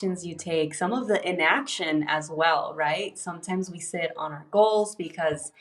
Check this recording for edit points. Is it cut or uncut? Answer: uncut